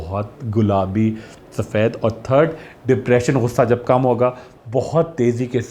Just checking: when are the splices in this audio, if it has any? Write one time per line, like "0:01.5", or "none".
0:04.5